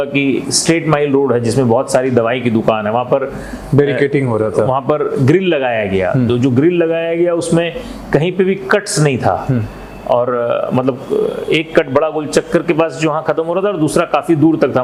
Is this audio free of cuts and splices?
yes; 0 cuts

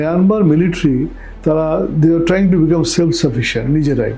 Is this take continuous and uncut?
yes; 0 cuts

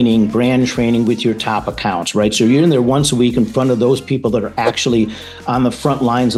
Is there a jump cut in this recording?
no; 0 cuts

